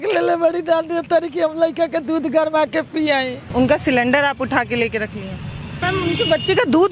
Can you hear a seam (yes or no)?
yes